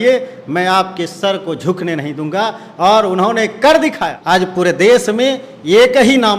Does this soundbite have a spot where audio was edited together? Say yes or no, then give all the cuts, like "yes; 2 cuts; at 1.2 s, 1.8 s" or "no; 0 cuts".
yes; 1 cut; at 4.1 s